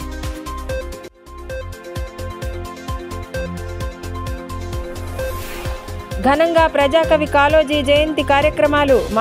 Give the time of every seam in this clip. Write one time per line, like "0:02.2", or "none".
0:01.0